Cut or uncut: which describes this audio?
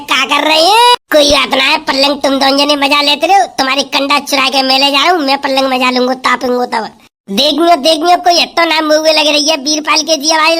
cut